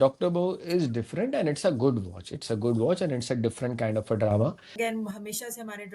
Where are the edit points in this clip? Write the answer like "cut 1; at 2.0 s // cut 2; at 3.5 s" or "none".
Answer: cut 1; at 4.7 s